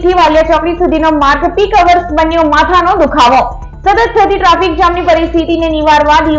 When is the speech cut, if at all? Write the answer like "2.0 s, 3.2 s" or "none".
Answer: none